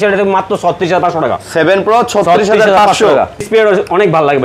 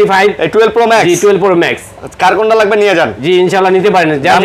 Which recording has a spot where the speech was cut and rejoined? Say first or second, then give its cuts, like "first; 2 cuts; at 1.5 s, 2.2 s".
first; 1 cut; at 3.4 s